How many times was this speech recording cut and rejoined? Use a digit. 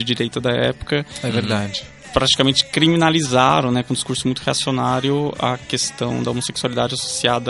0